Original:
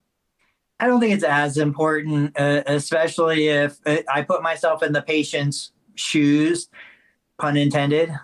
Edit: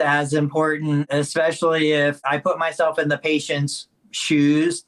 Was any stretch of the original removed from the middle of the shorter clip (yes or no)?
yes